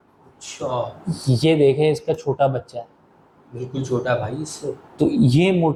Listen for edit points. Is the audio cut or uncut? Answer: uncut